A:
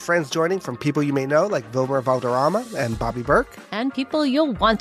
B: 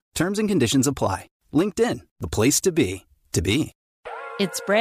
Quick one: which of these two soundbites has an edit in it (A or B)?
B